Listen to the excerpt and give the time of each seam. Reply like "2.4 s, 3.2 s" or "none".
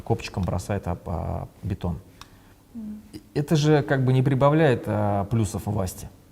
none